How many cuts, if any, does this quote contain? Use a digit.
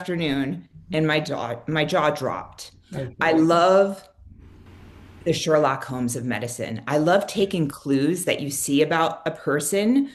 0